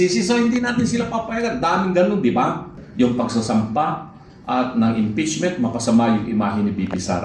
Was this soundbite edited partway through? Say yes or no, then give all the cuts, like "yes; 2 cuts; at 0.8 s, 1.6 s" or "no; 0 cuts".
yes; 1 cut; at 2.8 s